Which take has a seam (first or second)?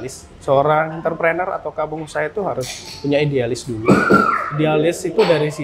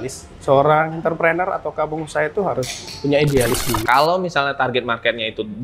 second